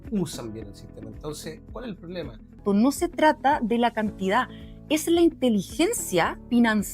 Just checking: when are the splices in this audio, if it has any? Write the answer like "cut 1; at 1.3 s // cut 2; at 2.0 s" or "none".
cut 1; at 2.6 s